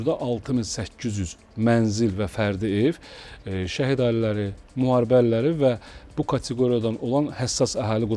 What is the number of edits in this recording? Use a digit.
0